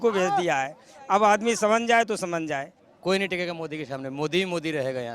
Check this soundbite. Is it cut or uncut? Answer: cut